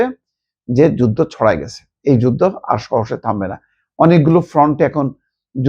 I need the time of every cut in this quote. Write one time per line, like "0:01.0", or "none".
none